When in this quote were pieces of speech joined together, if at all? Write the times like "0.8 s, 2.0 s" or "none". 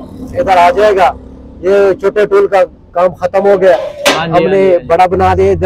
none

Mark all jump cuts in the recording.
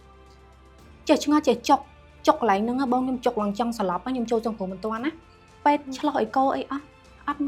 none

